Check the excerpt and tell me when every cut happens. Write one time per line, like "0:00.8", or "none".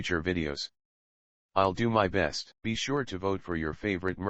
0:02.4